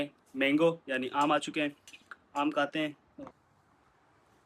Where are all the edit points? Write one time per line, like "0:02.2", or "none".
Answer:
0:03.1